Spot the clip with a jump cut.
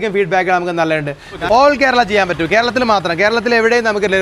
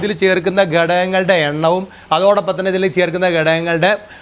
first; 1 cut; at 1.4 s

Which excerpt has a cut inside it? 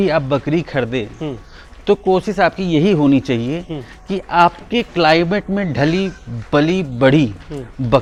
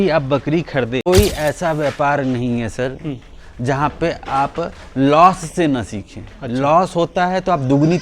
second; 1 cut; at 1.1 s

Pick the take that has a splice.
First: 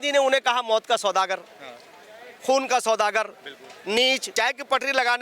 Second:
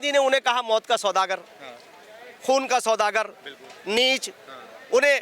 first; 1 cut; at 4.3 s

